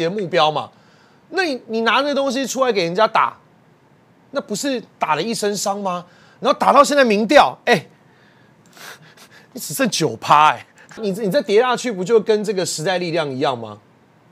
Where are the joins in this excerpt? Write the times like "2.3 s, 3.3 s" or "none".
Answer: 11.0 s